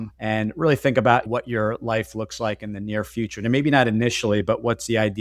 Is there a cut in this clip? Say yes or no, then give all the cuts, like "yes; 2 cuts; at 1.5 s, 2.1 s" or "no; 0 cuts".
no; 0 cuts